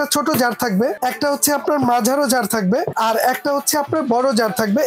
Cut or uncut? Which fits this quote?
cut